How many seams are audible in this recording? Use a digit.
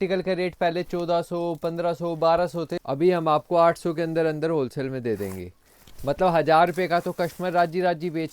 1